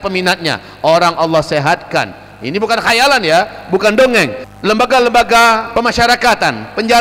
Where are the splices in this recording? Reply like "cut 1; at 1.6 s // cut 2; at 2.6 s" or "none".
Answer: cut 1; at 4.4 s // cut 2; at 5.7 s